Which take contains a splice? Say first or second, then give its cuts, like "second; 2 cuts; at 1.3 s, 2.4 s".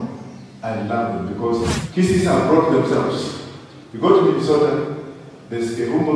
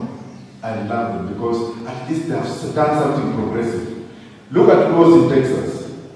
first; 1 cut; at 1.8 s